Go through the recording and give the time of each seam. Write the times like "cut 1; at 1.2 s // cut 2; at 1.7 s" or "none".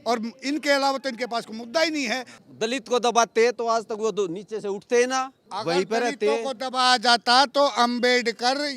cut 1; at 2.3 s // cut 2; at 5.4 s